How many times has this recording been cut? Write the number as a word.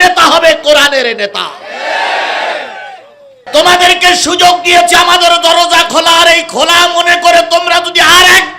one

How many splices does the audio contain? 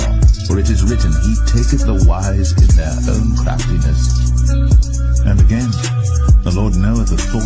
one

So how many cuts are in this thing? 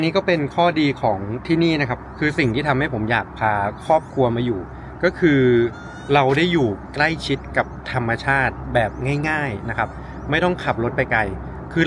zero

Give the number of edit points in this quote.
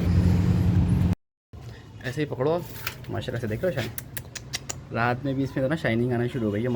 one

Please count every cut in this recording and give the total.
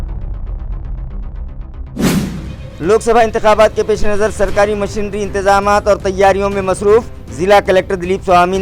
zero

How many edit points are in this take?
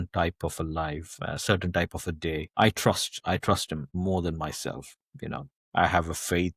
two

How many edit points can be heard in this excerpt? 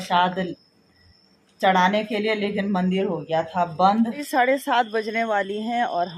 one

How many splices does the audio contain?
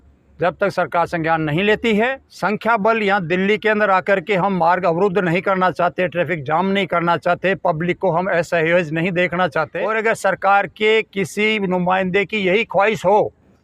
two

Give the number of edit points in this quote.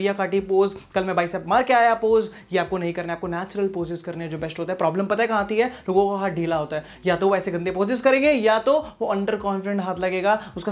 zero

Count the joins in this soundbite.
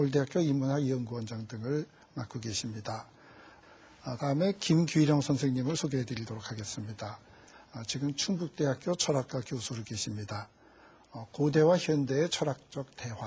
one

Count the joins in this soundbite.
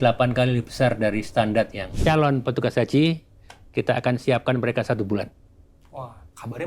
one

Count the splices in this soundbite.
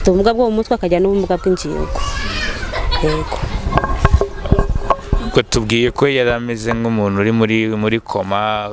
zero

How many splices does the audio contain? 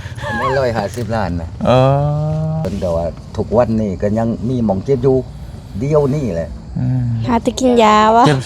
one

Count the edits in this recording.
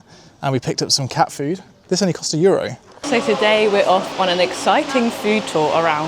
one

